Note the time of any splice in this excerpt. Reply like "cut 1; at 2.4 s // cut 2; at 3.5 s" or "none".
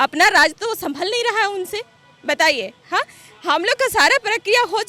none